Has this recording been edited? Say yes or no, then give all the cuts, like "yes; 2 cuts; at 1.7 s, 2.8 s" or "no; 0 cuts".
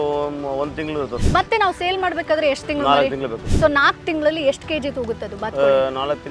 yes; 2 cuts; at 1.2 s, 3.4 s